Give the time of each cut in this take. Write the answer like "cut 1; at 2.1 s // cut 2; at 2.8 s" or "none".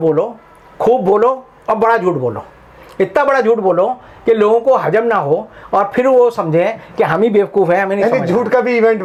none